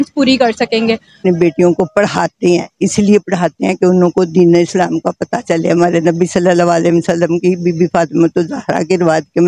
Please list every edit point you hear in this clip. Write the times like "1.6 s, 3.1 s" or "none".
1.2 s